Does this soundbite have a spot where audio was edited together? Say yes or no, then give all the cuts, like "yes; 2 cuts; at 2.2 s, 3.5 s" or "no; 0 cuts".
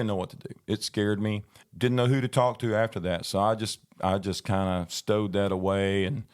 yes; 1 cut; at 1.7 s